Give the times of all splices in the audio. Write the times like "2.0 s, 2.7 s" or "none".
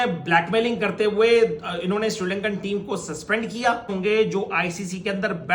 4.0 s